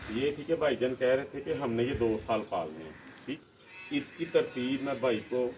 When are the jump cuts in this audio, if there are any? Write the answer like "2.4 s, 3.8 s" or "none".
3.4 s